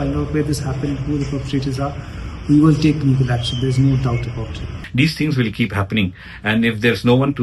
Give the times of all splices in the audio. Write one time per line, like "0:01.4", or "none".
0:04.8